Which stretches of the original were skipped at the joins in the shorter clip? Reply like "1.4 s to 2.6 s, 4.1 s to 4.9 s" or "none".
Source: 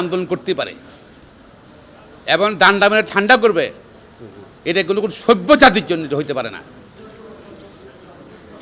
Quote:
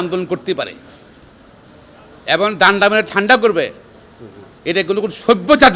none